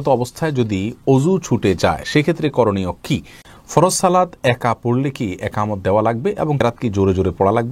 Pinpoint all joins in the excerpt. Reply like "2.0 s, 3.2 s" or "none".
3.5 s, 6.6 s